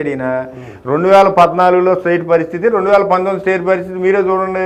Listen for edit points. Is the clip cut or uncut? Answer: uncut